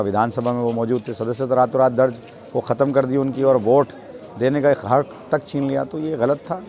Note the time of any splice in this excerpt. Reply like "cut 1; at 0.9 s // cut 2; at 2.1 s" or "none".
none